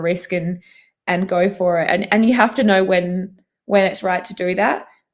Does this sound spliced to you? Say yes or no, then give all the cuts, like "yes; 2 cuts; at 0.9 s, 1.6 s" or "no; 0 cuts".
no; 0 cuts